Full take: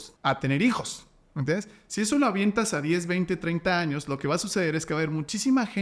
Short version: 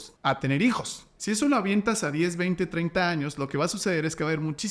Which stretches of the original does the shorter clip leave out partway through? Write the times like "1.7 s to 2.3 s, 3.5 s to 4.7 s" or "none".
1.1 s to 1.8 s